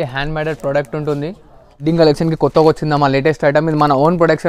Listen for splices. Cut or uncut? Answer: cut